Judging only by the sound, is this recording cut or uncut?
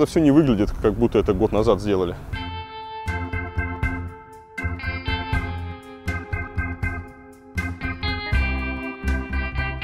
uncut